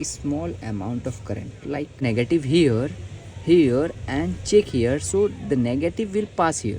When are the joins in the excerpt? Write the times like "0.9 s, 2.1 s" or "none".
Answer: 2.0 s